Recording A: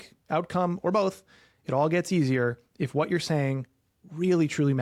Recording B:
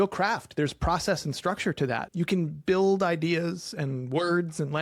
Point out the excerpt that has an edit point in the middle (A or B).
B